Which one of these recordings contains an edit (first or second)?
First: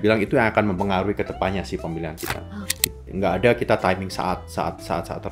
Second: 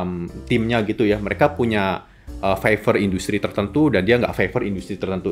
first